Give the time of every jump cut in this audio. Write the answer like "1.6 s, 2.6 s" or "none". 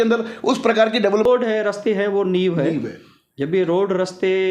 1.2 s